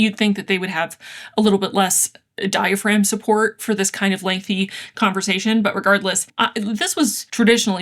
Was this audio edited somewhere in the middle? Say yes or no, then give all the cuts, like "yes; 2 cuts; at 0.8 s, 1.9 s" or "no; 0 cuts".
yes; 1 cut; at 6.3 s